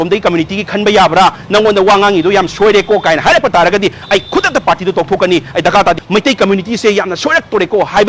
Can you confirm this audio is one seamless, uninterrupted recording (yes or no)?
no